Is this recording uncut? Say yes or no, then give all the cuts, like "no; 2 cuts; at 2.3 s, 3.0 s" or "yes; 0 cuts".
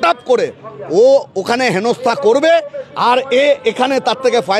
yes; 0 cuts